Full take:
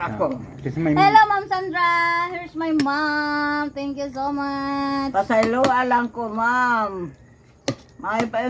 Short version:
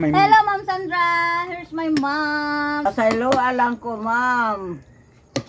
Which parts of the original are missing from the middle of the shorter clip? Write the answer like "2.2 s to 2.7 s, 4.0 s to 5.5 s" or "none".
3.7 s to 5.1 s